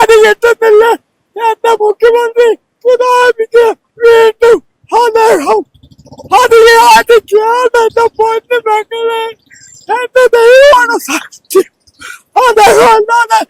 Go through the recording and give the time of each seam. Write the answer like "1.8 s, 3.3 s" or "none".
none